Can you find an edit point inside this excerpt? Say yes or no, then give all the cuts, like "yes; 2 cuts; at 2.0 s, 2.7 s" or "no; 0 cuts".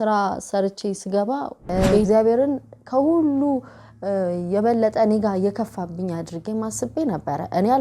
yes; 1 cut; at 2.1 s